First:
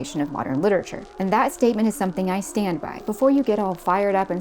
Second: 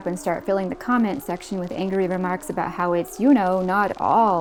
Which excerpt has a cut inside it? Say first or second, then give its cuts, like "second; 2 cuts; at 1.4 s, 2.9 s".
first; 1 cut; at 2.9 s